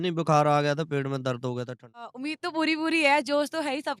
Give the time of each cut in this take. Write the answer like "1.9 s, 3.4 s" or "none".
2.2 s